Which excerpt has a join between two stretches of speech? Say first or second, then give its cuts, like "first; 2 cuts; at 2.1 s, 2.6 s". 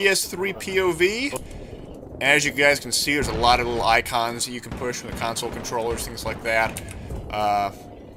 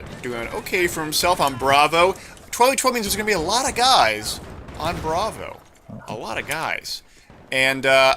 second; 1 cut; at 4.2 s